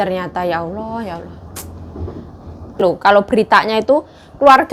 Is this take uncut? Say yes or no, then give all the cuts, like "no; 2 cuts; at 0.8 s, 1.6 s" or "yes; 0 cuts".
no; 1 cut; at 2.8 s